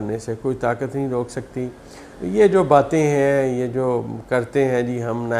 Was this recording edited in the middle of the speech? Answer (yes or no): no